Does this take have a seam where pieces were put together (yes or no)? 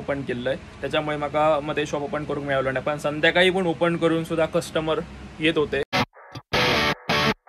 yes